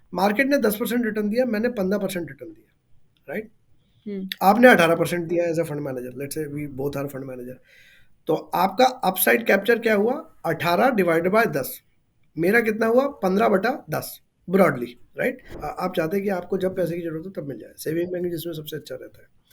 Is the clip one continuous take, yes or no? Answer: no